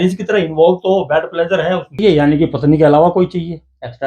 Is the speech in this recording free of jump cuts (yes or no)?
no